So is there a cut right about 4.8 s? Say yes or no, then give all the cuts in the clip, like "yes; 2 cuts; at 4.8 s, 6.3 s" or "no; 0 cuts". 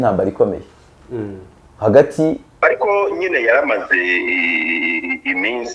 no; 1 cut; at 2.6 s